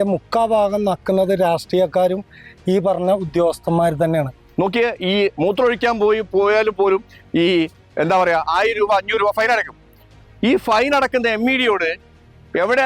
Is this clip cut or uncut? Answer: cut